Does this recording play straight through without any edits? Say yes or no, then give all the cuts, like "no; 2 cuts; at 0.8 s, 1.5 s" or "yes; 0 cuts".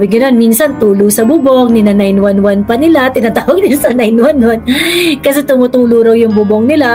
yes; 0 cuts